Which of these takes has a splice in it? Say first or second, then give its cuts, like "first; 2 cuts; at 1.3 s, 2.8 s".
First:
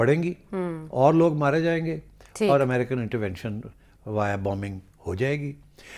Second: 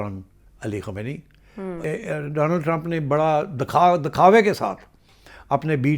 second; 1 cut; at 1.8 s